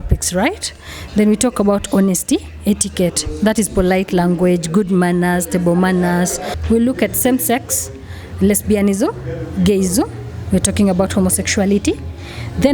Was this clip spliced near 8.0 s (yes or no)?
no